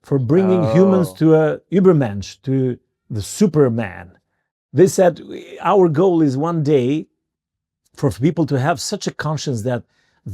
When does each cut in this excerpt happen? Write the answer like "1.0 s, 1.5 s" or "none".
4.5 s